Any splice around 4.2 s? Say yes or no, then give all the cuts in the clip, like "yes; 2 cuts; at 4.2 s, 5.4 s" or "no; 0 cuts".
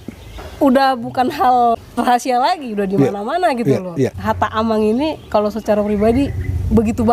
yes; 1 cut; at 4.2 s